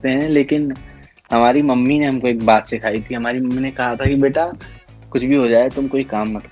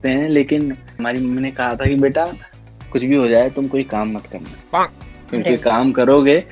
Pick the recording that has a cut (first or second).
second